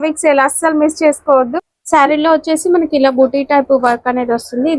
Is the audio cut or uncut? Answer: cut